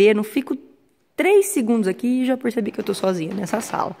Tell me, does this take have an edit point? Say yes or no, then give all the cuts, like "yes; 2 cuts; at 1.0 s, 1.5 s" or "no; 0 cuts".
no; 0 cuts